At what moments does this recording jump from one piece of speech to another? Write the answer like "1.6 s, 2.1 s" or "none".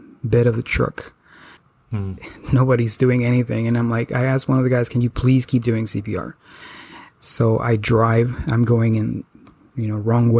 2.0 s